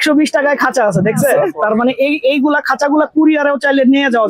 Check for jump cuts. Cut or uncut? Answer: cut